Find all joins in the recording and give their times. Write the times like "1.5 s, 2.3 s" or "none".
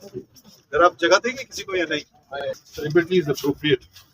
2.4 s